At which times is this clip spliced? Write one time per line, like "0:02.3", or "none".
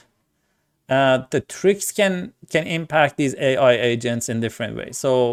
none